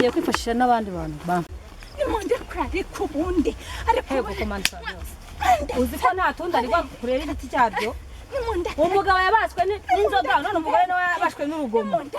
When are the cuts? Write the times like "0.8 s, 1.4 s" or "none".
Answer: 1.5 s